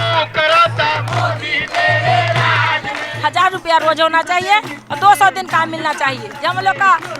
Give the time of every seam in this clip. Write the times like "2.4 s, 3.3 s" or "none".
3.1 s, 6.3 s